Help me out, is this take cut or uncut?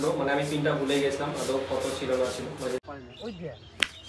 cut